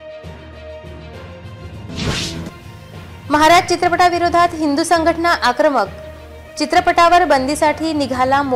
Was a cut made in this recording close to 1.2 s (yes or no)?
yes